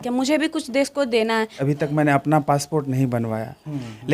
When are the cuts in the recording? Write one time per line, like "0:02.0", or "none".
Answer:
0:01.6